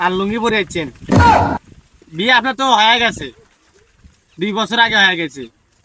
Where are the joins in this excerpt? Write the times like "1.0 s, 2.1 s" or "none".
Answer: none

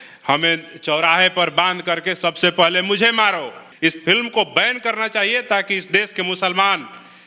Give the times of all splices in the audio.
3.6 s

